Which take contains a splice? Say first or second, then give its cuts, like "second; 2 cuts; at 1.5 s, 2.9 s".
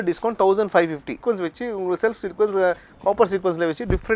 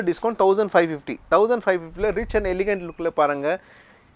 first; 1 cut; at 1.1 s